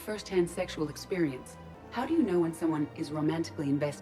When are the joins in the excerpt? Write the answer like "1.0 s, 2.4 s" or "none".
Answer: 1.6 s